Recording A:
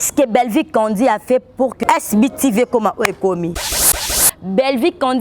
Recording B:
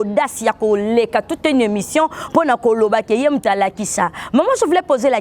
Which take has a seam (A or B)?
A